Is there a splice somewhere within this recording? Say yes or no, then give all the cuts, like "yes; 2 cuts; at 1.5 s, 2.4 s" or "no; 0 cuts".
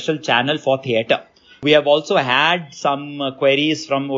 yes; 1 cut; at 1.6 s